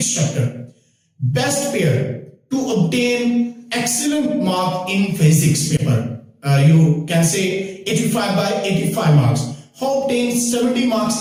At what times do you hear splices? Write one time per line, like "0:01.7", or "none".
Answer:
none